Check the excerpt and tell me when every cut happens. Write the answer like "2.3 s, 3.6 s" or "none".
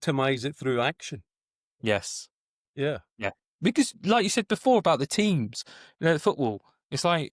none